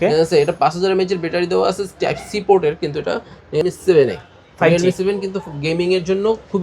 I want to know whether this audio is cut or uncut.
cut